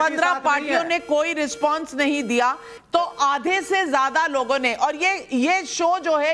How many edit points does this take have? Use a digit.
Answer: 1